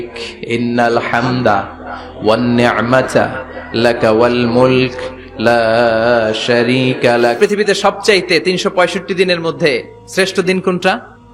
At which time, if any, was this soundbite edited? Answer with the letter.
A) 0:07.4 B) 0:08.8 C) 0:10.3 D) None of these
A